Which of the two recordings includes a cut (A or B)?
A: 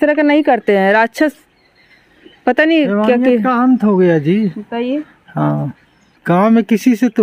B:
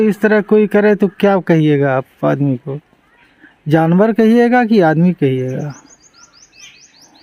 A